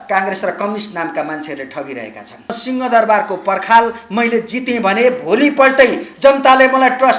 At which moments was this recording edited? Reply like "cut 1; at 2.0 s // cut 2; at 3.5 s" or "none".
cut 1; at 2.5 s